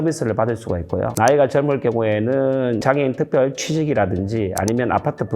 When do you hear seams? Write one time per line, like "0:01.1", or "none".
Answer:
0:01.1